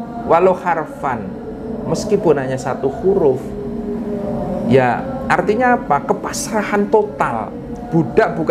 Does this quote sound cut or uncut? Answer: uncut